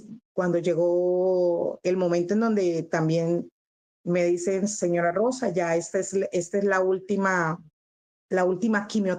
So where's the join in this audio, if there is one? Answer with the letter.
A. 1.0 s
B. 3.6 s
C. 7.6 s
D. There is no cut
D